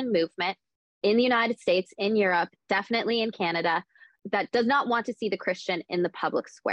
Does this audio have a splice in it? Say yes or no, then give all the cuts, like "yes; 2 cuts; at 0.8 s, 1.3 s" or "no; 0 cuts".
yes; 1 cut; at 4.1 s